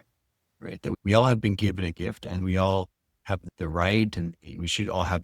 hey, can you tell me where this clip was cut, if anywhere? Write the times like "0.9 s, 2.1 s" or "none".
0.9 s, 3.4 s